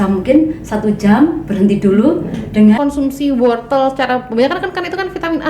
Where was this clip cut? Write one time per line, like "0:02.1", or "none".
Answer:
0:02.8